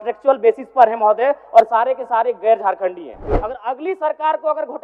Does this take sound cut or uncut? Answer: cut